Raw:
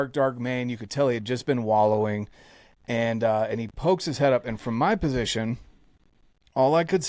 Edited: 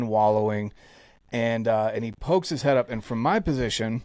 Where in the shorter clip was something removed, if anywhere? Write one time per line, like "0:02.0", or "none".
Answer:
none